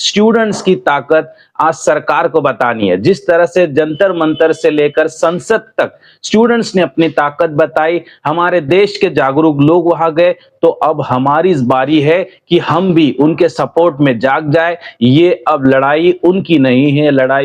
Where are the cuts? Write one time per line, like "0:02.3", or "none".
none